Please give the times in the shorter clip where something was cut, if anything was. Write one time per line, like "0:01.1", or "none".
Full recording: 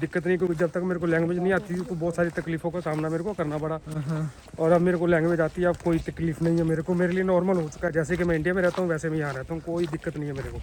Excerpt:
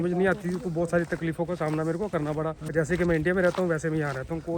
0:02.7